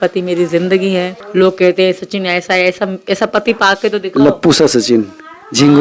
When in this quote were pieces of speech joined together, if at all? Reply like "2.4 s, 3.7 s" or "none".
1.2 s